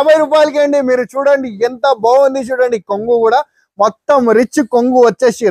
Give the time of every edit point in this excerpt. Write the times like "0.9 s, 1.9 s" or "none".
none